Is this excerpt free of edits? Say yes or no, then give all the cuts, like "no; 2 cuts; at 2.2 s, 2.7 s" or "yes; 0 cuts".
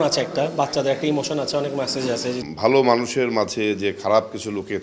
no; 1 cut; at 2.4 s